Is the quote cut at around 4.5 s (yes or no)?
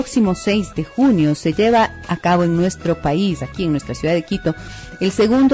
yes